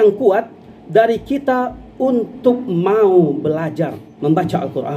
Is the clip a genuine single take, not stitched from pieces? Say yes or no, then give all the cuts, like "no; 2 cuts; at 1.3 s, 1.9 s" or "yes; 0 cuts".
no; 1 cut; at 4.0 s